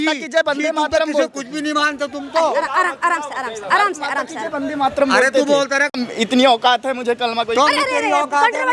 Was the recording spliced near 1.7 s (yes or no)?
no